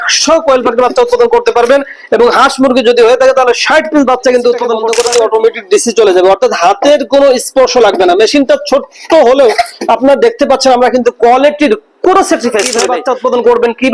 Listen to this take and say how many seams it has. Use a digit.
2